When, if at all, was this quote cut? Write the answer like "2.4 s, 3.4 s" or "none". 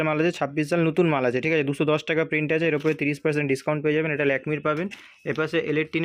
none